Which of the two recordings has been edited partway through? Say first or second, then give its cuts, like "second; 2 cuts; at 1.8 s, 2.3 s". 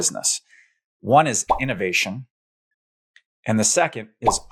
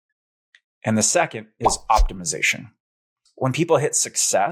second; 1 cut; at 3.1 s